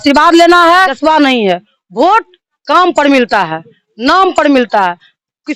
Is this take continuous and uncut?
no; 1 cut; at 0.9 s

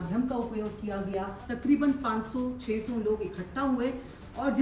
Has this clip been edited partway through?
yes; 1 cut; at 1.4 s

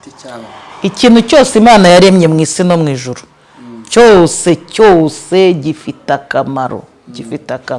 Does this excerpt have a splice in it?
no; 0 cuts

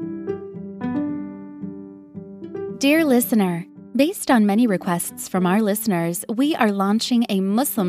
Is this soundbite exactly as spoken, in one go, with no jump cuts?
no; 1 cut; at 2.7 s

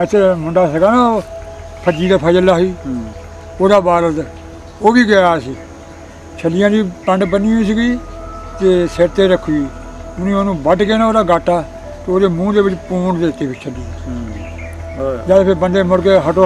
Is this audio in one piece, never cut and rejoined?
yes; 0 cuts

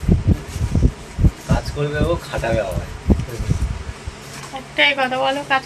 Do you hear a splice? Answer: no; 0 cuts

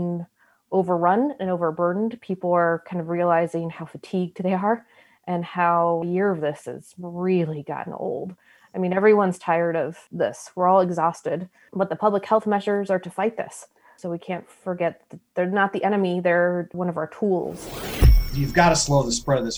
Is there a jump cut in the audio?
yes; 1 cut; at 18.1 s

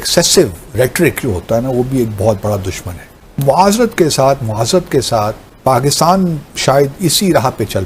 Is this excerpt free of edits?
no; 2 cuts; at 3.1 s, 5.5 s

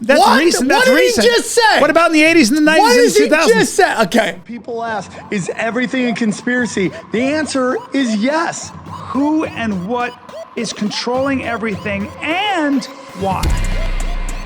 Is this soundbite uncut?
no; 1 cut; at 4.4 s

